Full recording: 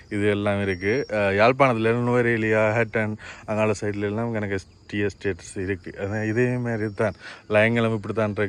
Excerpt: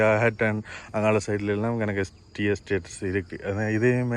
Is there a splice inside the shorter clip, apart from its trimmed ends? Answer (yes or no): no